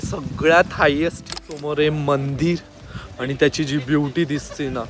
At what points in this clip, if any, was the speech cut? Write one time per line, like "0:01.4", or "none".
0:01.2